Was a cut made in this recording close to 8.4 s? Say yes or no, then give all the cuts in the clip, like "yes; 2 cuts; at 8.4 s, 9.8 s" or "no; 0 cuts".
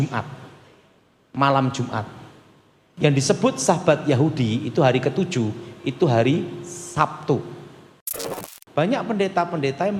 yes; 1 cut; at 8.4 s